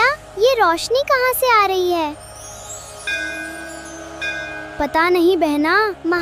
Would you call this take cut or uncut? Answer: uncut